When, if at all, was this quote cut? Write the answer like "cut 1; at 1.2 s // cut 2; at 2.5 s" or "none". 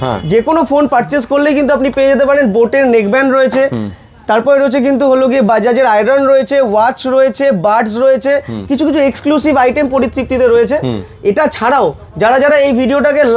none